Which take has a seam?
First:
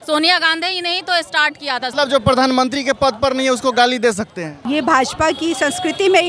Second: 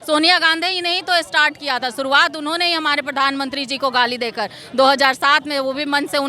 first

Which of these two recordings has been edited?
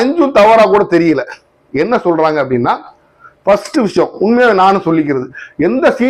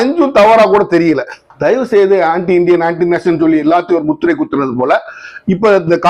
second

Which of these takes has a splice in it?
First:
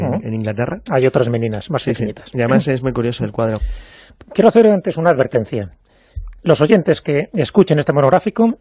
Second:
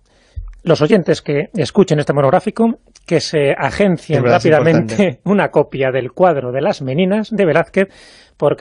first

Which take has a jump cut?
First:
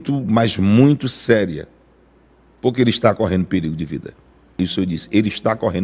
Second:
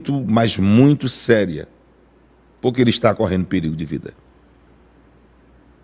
first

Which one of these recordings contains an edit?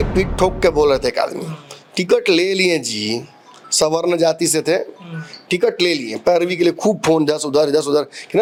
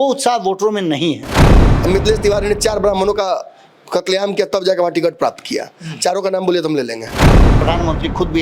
second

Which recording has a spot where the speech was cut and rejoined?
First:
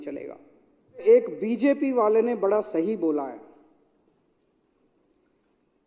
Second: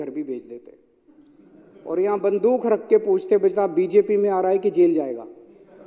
first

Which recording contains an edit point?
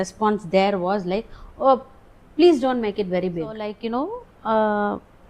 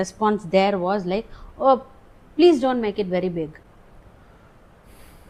first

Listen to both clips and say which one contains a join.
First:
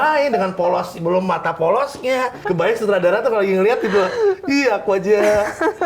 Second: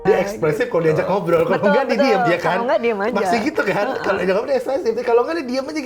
first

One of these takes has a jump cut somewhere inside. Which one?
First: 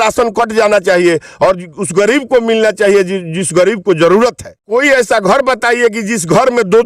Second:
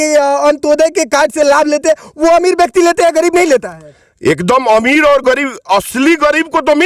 first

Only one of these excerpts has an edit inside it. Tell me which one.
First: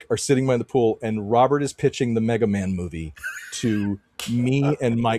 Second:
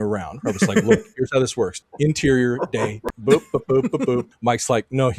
second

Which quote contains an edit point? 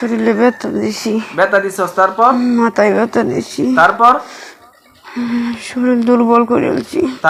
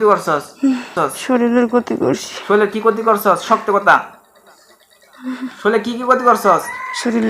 second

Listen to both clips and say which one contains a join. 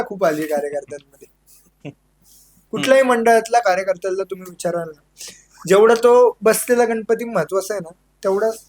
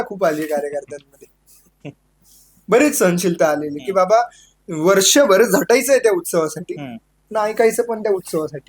first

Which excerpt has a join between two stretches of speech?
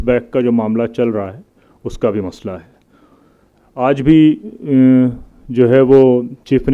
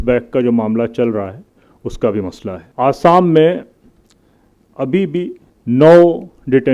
second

